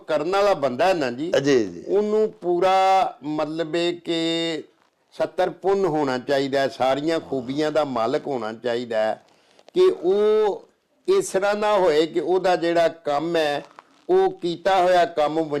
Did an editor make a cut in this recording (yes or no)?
no